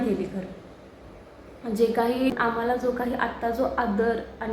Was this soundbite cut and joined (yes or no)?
yes